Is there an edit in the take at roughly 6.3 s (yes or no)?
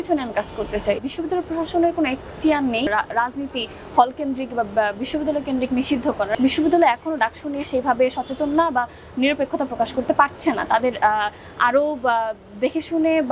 yes